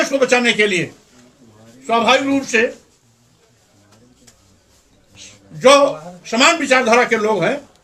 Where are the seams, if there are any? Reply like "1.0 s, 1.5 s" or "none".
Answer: none